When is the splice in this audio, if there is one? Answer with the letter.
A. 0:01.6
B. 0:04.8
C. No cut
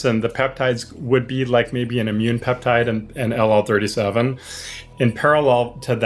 B